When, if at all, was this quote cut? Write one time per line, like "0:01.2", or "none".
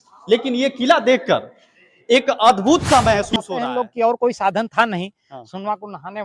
0:03.4